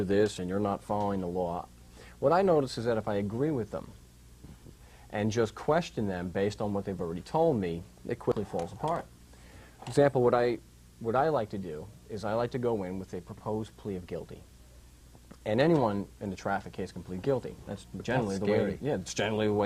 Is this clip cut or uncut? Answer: uncut